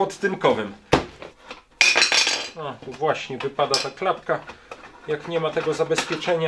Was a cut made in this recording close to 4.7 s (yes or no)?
no